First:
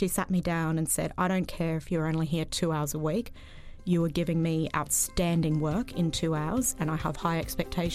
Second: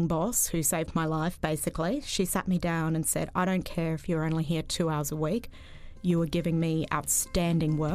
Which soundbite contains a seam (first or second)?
first